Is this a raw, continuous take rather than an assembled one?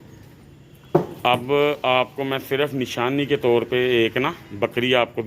yes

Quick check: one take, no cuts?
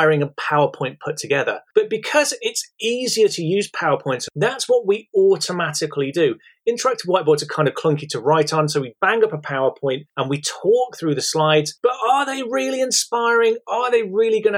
no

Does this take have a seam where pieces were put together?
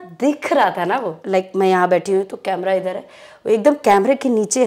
yes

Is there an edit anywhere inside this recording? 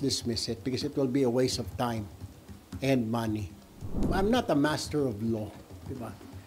yes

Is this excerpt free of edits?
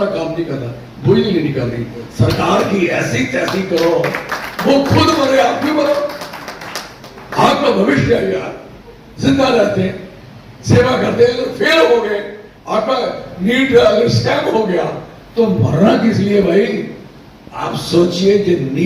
yes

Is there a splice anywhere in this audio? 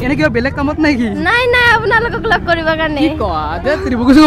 no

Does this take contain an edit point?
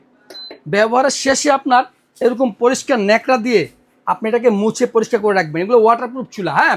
no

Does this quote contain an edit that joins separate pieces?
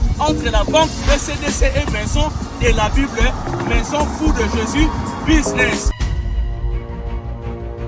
yes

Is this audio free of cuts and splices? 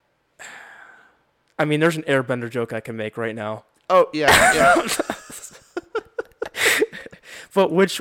yes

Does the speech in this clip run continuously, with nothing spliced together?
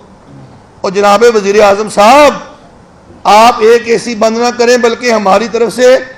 yes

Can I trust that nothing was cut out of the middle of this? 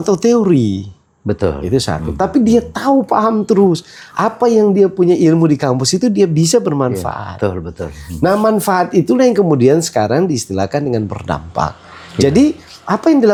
yes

